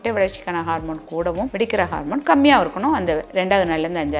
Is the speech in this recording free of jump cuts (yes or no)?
no